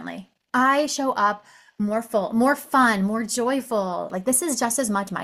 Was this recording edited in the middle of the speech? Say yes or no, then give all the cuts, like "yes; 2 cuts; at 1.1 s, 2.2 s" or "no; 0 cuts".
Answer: yes; 1 cut; at 4.1 s